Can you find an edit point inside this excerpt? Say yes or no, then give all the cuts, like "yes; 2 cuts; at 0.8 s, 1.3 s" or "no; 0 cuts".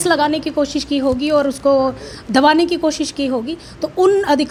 no; 0 cuts